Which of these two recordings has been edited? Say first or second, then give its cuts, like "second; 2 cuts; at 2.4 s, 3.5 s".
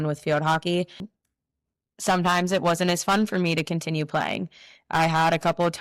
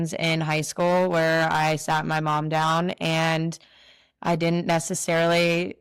first; 1 cut; at 1.1 s